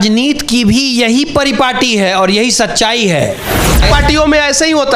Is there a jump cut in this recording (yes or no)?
yes